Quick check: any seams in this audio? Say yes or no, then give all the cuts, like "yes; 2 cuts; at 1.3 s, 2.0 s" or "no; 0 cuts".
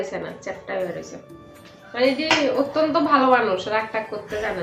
no; 0 cuts